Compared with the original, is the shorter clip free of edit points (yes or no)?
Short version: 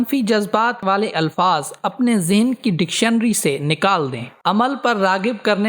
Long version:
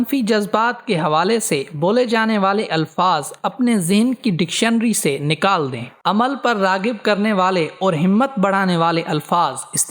no